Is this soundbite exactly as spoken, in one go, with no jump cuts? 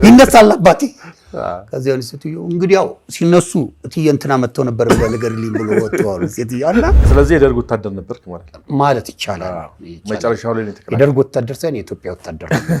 no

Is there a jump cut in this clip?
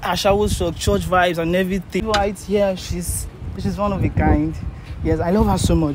yes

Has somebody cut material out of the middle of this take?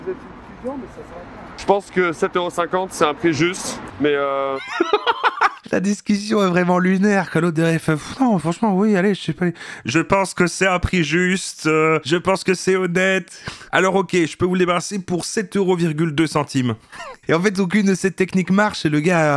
no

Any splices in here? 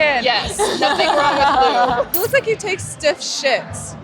yes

